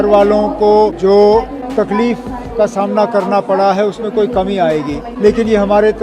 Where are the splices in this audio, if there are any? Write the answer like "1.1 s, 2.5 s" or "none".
0.9 s, 1.6 s, 5.1 s